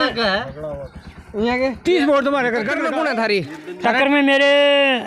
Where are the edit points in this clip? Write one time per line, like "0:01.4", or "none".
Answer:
0:02.7

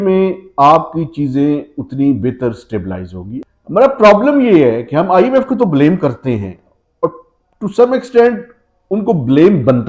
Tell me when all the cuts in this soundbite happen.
0:03.5

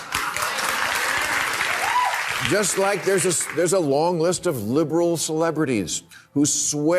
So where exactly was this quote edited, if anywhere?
0:02.2

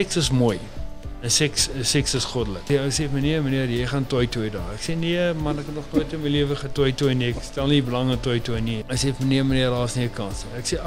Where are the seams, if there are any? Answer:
0:02.7
0:08.8

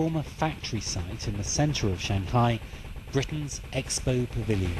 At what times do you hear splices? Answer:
none

